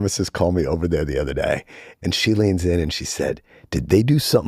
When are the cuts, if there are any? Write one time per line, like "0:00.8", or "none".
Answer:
0:01.8